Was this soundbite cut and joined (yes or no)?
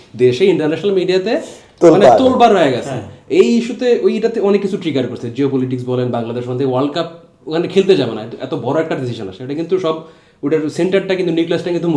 no